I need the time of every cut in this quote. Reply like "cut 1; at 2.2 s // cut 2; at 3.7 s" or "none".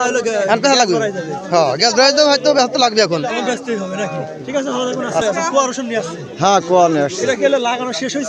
cut 1; at 5.2 s